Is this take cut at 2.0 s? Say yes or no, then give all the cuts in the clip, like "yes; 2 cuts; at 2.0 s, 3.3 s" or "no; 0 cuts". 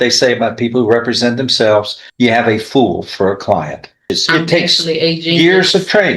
yes; 2 cuts; at 2.0 s, 4.1 s